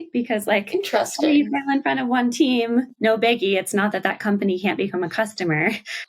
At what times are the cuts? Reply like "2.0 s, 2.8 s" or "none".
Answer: 2.9 s